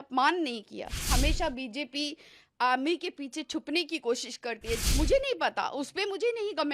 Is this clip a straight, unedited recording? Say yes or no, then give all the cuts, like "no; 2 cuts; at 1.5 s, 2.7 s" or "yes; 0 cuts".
no; 2 cuts; at 1.1 s, 4.8 s